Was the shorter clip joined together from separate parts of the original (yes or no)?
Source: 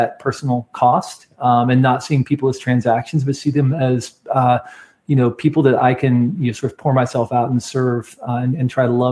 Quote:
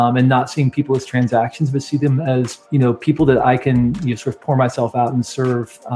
yes